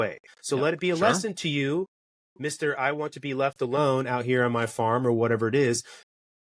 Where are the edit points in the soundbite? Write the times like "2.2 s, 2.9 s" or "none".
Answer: none